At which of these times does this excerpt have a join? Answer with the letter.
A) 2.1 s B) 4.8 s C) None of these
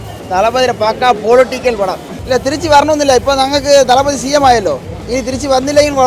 A